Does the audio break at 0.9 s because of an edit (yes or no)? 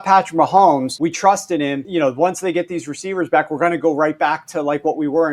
yes